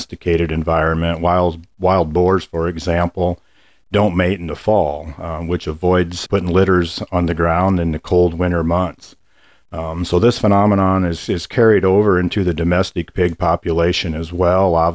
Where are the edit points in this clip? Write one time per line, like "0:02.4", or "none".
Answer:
none